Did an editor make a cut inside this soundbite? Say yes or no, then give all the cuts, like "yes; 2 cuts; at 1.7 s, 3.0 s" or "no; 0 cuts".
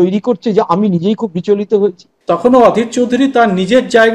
yes; 1 cut; at 2.1 s